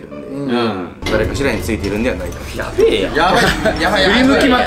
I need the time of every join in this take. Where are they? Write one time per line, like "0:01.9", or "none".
0:00.9